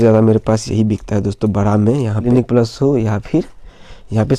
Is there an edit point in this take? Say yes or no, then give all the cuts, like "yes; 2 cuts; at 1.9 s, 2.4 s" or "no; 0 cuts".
yes; 1 cut; at 2.3 s